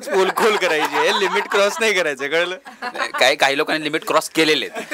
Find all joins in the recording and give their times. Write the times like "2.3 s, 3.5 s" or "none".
none